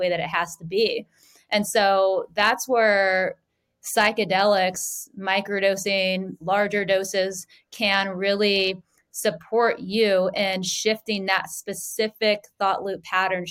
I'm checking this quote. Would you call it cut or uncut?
uncut